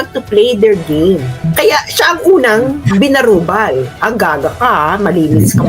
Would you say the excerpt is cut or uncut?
cut